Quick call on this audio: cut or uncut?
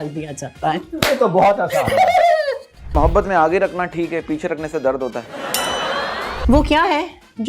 cut